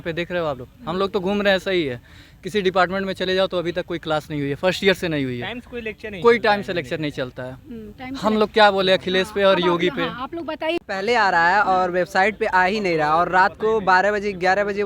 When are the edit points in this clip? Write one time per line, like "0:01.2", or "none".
0:10.7